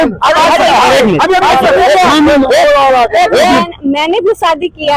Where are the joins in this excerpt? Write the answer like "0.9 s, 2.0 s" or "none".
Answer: 3.5 s

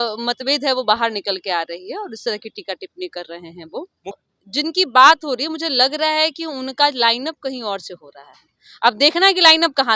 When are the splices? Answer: 4.1 s

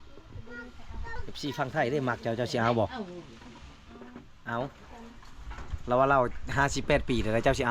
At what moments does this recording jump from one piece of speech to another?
1.2 s

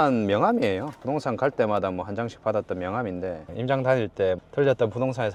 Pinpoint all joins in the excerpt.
none

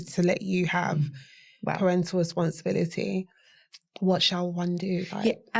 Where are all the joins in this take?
none

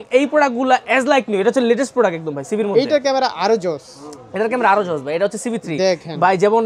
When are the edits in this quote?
none

